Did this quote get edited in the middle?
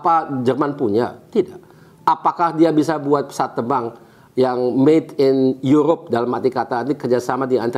no; 0 cuts

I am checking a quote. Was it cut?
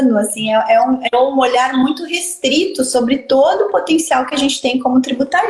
no; 0 cuts

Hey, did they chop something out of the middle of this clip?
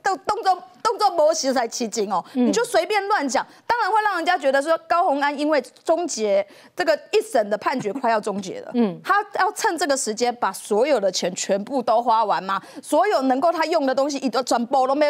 no; 0 cuts

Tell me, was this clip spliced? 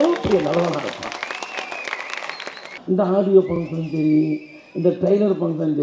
yes; 1 cut; at 2.8 s

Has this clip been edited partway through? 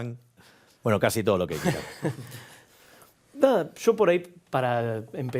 no; 0 cuts

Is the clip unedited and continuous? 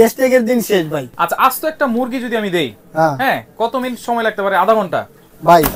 no; 1 cut; at 1.1 s

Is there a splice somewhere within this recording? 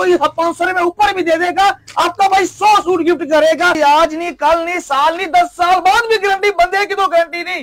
yes; 1 cut; at 3.8 s

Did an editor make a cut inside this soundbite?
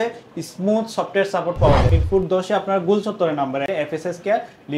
yes; 2 cuts; at 1.9 s, 3.7 s

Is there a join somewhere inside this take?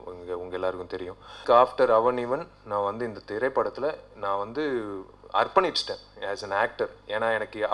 yes; 1 cut; at 1.4 s

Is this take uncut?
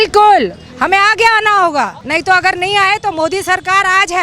no; 1 cut; at 2.0 s

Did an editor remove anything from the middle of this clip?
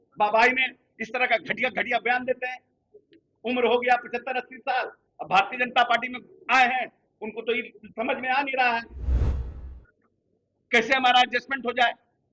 no; 0 cuts

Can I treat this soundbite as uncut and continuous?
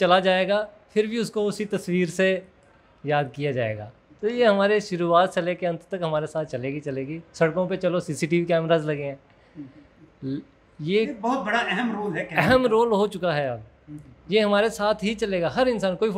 yes; 0 cuts

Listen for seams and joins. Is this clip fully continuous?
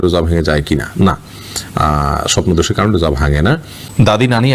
yes; 0 cuts

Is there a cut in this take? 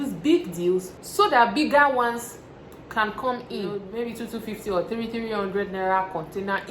yes; 2 cuts; at 1.0 s, 3.9 s

